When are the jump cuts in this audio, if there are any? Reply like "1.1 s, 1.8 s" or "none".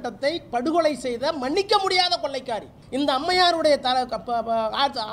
2.8 s